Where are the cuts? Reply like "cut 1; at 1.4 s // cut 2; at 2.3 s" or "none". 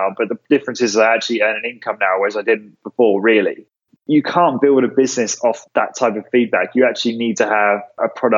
cut 1; at 3.9 s